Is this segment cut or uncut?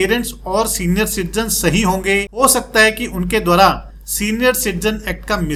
uncut